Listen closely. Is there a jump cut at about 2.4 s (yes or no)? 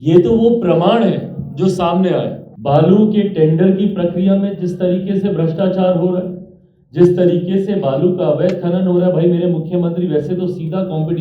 yes